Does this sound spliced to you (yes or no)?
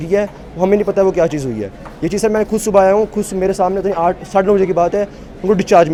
no